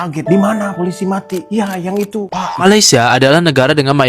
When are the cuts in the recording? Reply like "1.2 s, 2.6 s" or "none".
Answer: 2.6 s